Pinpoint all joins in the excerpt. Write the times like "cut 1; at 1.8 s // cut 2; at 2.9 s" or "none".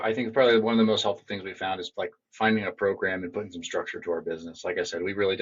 none